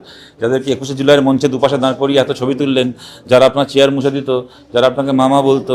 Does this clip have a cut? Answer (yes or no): no